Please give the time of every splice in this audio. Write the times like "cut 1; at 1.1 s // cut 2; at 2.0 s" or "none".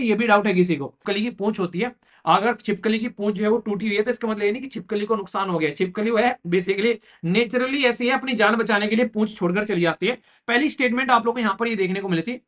cut 1; at 1.0 s // cut 2; at 10.3 s